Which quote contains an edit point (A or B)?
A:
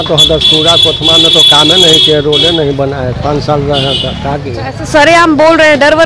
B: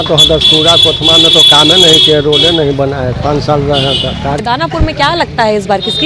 B